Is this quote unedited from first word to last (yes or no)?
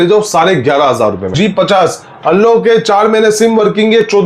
no